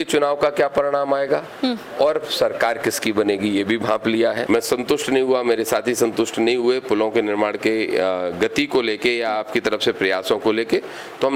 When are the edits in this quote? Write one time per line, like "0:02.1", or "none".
0:04.4